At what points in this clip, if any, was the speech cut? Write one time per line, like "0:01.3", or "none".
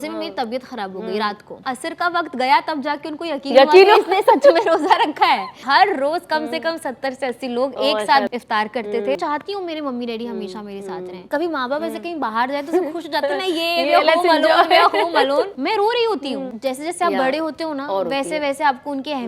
0:01.6
0:05.6
0:08.3
0:09.2
0:11.3
0:15.6
0:16.5